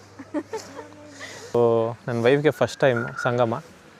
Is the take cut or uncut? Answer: cut